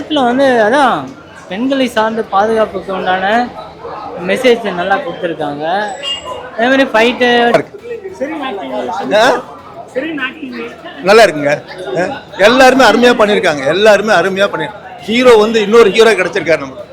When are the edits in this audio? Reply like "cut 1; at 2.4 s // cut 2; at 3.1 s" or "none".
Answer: cut 1; at 7.5 s